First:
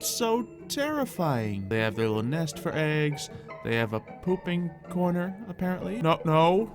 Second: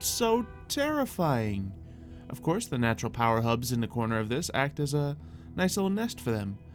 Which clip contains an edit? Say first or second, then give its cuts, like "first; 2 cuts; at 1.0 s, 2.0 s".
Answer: first; 2 cuts; at 1.7 s, 5.9 s